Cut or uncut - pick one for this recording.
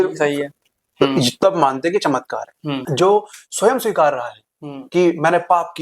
cut